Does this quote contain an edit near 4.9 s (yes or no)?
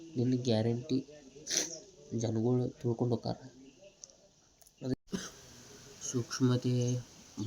yes